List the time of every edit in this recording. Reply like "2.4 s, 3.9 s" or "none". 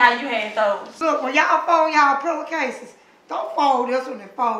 1.0 s